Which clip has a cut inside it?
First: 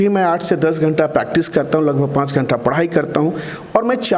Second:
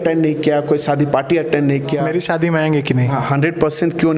second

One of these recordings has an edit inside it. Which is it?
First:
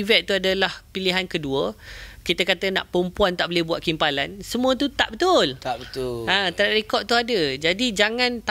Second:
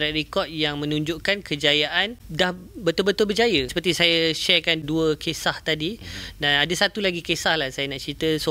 second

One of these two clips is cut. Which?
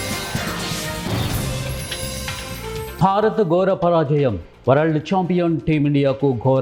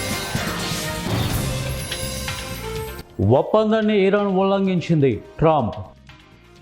second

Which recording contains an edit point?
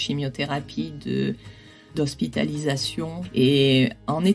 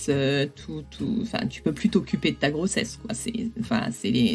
first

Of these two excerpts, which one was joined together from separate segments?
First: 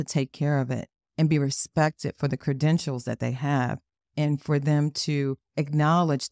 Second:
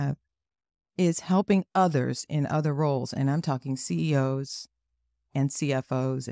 second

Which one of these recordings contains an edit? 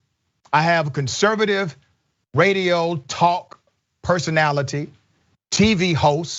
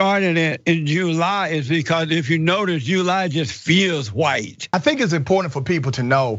second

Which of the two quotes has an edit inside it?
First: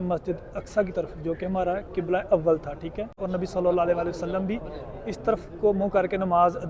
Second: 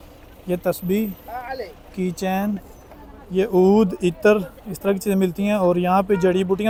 first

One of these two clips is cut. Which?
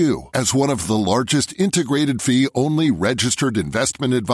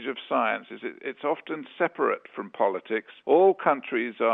second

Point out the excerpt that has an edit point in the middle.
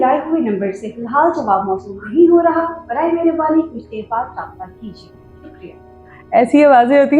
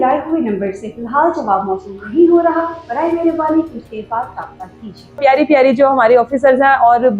second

